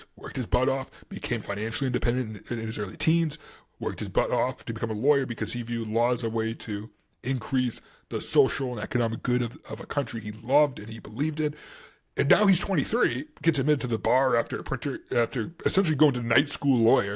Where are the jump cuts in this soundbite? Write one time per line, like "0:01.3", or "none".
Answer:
none